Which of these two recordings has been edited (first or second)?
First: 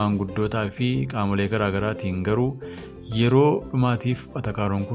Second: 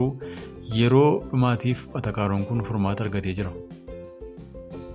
second